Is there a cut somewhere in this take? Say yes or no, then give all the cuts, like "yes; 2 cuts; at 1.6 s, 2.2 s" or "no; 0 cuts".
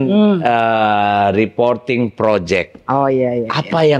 no; 0 cuts